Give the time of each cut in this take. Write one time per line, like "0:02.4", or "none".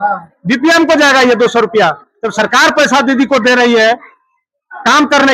none